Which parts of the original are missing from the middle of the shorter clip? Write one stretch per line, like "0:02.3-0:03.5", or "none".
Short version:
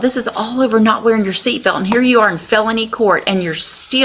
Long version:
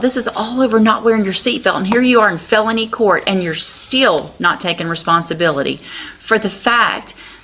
none